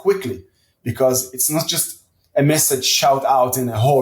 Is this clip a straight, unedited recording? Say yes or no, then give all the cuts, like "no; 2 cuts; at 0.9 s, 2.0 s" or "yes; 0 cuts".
yes; 0 cuts